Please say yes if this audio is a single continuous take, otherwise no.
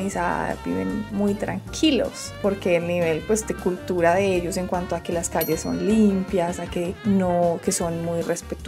yes